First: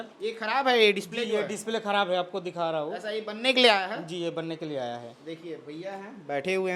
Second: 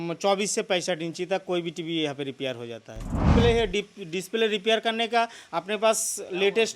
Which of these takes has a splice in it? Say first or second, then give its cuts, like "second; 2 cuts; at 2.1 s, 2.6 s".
second; 1 cut; at 3.2 s